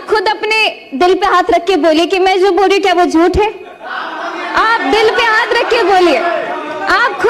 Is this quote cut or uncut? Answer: uncut